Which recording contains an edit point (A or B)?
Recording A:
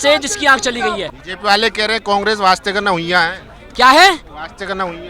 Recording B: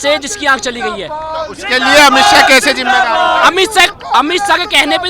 A